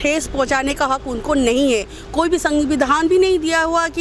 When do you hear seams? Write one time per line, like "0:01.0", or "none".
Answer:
none